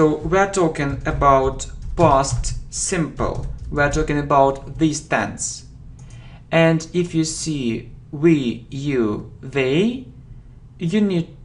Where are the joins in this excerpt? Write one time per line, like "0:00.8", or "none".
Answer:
none